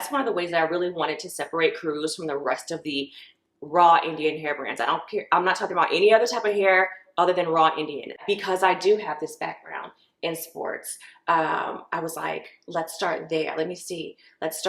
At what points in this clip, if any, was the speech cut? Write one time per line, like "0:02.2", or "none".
0:08.2